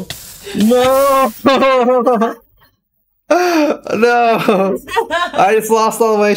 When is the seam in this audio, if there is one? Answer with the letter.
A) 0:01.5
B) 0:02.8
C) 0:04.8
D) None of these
C